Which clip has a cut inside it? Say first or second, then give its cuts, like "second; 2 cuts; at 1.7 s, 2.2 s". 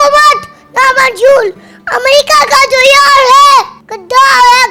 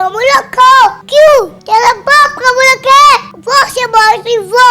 second; 3 cuts; at 1.0 s, 1.6 s, 3.3 s